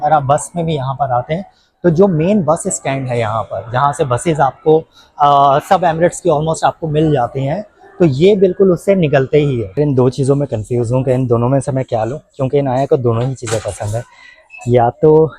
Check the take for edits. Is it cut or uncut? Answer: cut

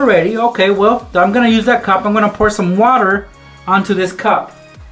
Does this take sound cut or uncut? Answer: uncut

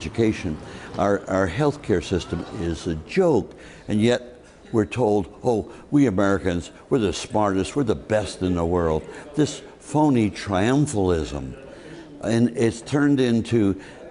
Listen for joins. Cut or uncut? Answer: uncut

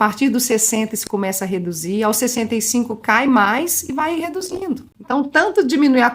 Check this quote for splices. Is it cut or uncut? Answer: cut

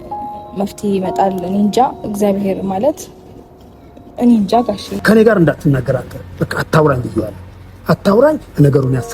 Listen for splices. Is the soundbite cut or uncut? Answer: cut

